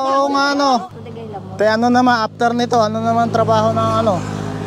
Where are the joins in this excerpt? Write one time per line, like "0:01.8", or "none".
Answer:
0:00.9